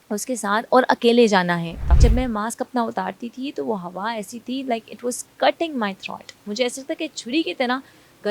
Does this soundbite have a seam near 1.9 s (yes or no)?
yes